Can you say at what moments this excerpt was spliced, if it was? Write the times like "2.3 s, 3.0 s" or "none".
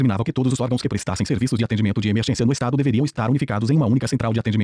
3.1 s

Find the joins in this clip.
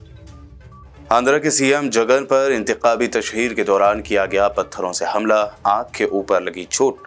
none

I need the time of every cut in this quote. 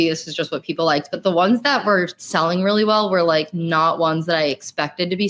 none

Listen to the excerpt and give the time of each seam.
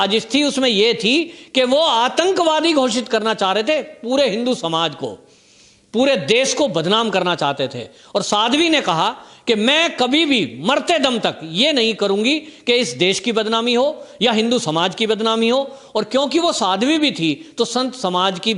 none

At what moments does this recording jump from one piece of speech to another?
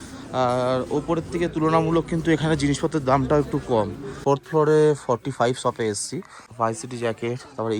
4.2 s, 6.4 s

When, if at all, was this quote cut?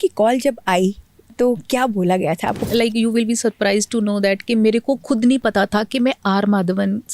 2.7 s

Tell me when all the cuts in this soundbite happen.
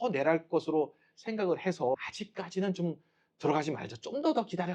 2.1 s

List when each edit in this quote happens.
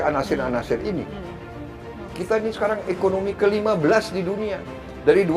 1.6 s

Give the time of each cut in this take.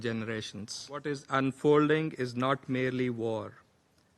1.0 s

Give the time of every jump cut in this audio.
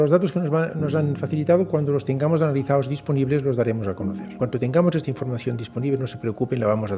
4.3 s

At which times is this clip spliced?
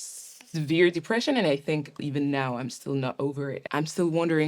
2.0 s, 3.6 s

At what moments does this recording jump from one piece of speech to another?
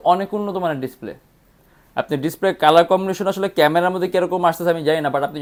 none

